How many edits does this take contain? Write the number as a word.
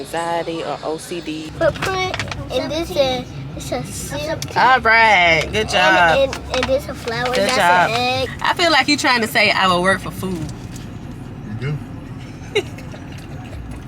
two